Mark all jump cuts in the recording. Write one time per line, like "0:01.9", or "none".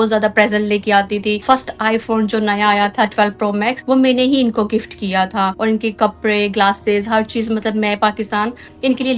0:01.4
0:03.8
0:05.6